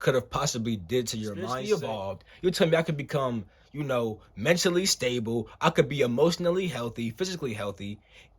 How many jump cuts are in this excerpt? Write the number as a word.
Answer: one